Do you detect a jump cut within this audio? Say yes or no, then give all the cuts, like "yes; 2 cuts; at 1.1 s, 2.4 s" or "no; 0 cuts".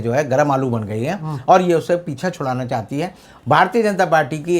yes; 1 cut; at 3.3 s